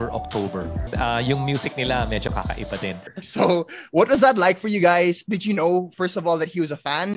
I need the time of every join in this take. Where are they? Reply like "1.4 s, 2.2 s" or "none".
none